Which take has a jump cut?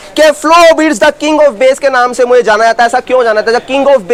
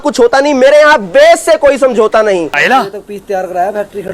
second; 1 cut; at 2.5 s

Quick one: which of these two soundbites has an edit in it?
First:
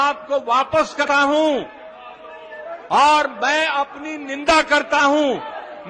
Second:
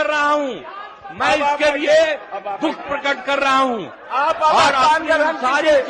first; 1 cut; at 1.0 s

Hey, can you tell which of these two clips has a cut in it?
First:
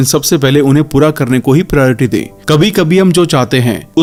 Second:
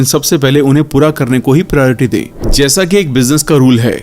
second; 1 cut; at 2.3 s

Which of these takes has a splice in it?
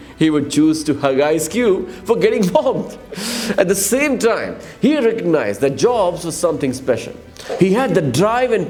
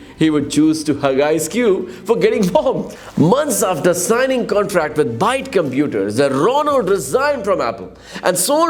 second; 1 cut; at 3.0 s

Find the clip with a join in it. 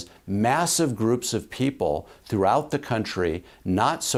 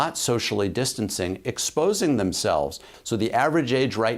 second; 1 cut; at 2.9 s

